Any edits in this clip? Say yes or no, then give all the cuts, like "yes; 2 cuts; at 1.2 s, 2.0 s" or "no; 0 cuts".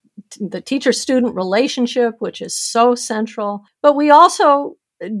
yes; 1 cut; at 3.6 s